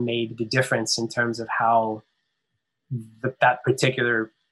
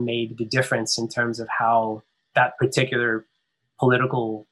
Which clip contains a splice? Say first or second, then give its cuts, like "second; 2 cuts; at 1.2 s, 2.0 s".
second; 1 cut; at 2.3 s